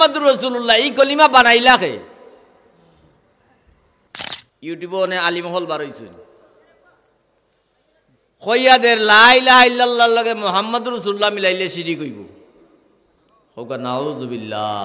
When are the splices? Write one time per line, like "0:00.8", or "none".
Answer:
0:04.1